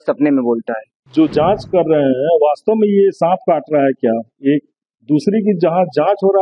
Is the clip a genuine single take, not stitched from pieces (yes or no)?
no